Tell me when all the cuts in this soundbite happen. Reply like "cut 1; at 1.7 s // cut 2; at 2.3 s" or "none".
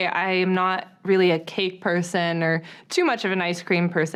none